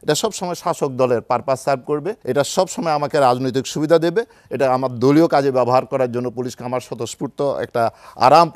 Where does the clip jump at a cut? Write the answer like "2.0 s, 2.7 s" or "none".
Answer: 2.1 s